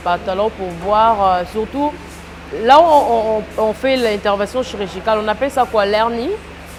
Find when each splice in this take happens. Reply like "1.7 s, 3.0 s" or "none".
none